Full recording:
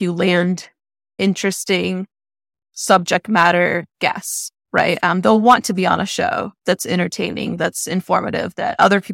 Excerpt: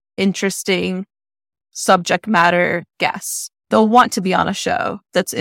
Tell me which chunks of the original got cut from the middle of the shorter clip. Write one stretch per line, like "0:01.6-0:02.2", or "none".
0:04.7-0:05.2